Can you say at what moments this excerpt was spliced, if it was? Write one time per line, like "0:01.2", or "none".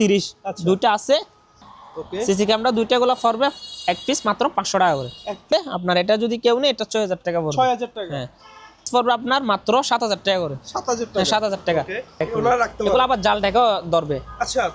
0:01.6
0:05.5
0:08.9
0:12.3